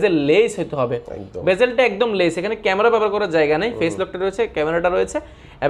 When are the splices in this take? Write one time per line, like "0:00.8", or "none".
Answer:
none